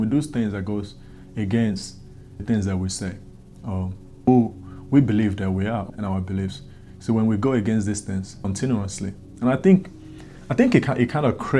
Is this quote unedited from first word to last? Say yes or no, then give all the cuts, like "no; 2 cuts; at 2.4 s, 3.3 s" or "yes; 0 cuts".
no; 4 cuts; at 2.4 s, 4.3 s, 5.9 s, 8.4 s